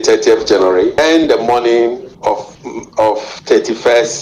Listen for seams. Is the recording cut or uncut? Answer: cut